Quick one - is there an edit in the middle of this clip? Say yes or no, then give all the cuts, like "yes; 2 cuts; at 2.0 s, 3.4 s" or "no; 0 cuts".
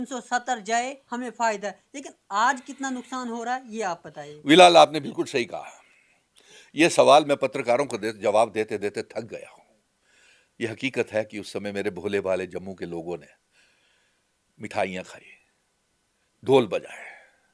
no; 0 cuts